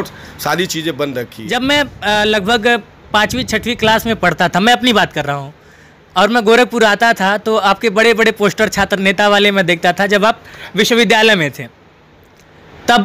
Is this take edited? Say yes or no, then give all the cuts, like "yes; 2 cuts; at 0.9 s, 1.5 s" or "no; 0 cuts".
yes; 1 cut; at 1.4 s